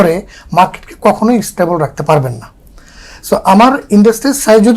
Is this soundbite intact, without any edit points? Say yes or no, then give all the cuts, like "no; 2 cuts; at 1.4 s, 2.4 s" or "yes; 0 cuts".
yes; 0 cuts